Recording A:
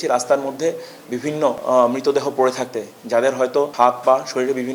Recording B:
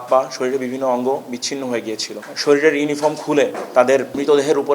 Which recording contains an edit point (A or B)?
B